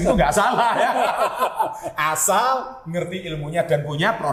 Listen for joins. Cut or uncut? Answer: uncut